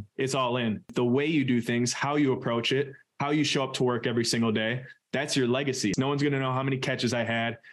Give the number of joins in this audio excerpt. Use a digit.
2